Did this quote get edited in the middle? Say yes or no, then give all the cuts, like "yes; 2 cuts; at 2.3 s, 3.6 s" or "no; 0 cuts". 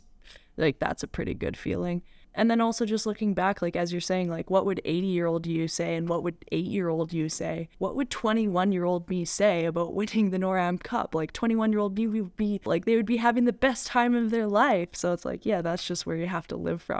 yes; 3 cuts; at 2.2 s, 7.7 s, 12.6 s